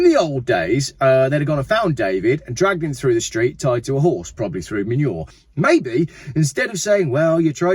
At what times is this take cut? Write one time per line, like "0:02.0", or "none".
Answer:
0:05.3